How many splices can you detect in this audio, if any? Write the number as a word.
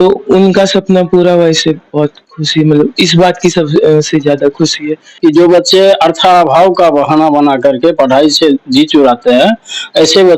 one